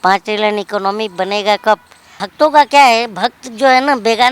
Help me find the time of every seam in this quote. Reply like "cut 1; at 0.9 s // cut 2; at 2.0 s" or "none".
cut 1; at 2.2 s